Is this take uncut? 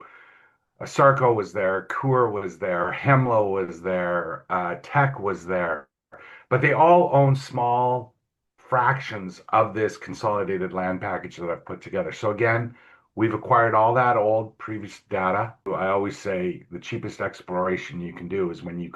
no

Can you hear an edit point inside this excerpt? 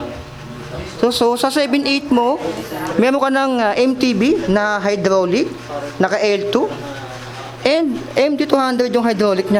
no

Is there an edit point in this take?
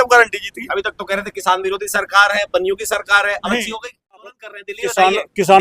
yes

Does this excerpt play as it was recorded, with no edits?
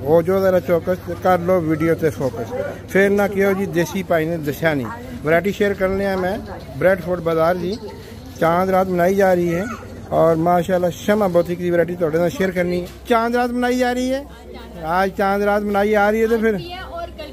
no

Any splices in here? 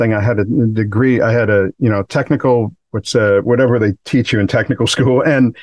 yes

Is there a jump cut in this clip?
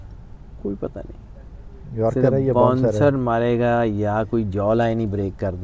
no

